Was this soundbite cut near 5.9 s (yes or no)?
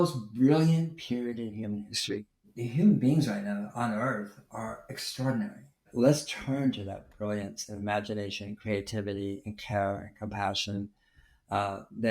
yes